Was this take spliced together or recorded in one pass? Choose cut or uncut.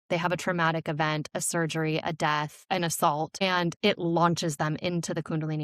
cut